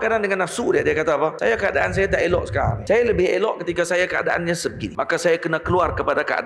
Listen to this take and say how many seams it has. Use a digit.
3